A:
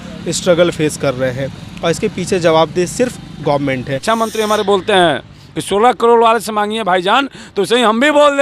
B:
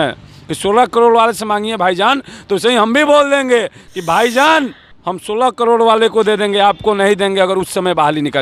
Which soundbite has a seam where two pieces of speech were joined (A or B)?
A